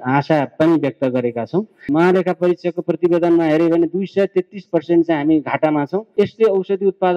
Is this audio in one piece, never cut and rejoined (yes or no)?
no